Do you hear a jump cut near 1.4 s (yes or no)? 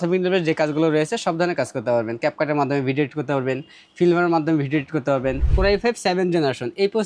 no